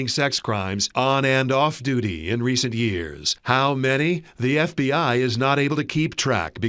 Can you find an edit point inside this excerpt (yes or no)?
no